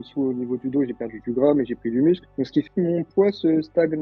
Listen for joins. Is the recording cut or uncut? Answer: uncut